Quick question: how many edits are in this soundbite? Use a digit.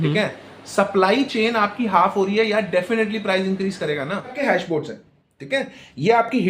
1